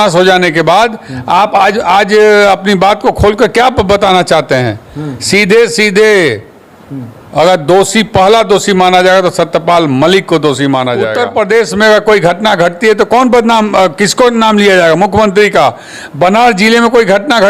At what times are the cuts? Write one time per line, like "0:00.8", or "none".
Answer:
0:11.1